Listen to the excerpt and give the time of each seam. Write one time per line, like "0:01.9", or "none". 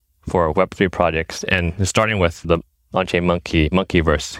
0:02.4